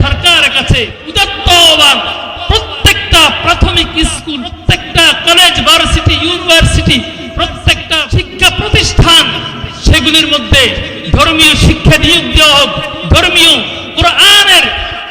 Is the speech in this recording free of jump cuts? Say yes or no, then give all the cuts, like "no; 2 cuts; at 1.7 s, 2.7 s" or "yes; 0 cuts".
no; 3 cuts; at 1.1 s, 4.6 s, 8.1 s